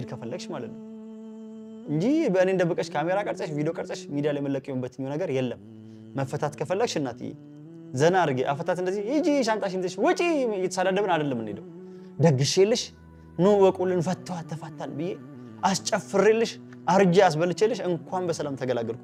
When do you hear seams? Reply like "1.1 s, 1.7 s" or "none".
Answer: none